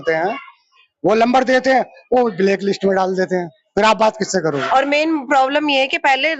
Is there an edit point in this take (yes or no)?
yes